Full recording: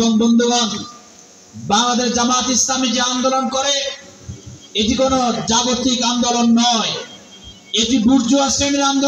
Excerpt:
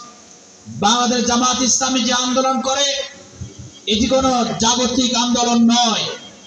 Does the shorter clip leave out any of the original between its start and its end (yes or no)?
no